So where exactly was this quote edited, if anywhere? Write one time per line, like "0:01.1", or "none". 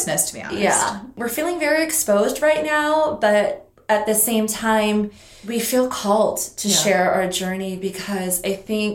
0:01.2
0:03.7
0:05.3